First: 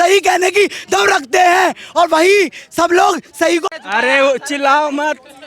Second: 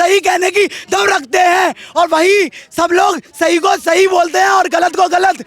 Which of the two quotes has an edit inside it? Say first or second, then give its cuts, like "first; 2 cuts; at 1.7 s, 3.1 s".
first; 1 cut; at 3.6 s